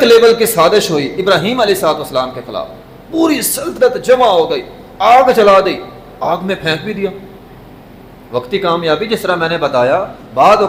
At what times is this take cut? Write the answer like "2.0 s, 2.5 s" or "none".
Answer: none